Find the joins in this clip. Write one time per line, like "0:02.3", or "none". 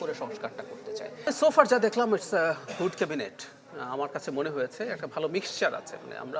0:01.3